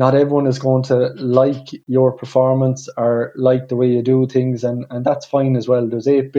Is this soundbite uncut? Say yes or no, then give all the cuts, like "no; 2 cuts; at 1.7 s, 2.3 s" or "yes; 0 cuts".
yes; 0 cuts